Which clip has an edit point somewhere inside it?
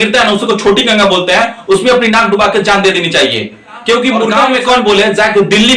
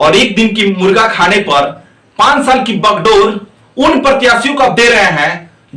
first; 1 cut; at 4.4 s

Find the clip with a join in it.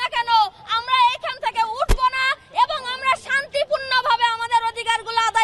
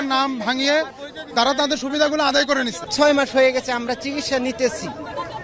second; 1 cut; at 2.9 s

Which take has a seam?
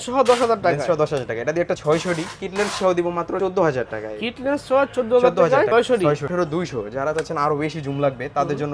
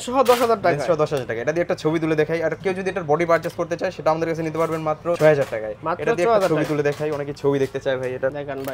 first; 3 cuts; at 1.8 s, 3.4 s, 6.0 s

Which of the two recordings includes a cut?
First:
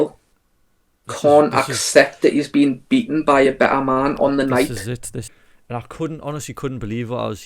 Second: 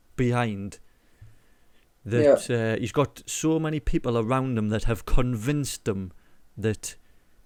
first; 1 cut; at 5.3 s

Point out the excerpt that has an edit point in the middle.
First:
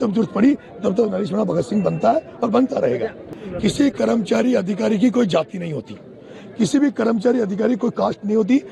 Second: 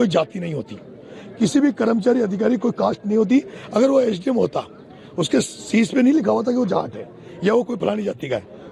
first; 1 cut; at 3.3 s

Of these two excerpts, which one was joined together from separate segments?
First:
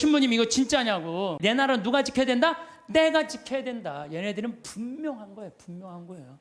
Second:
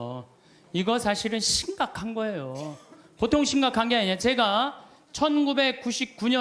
first; 1 cut; at 1.4 s

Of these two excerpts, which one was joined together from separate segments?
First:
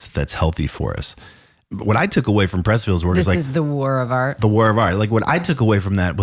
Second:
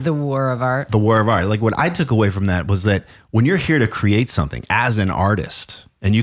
first; 1 cut; at 1.6 s

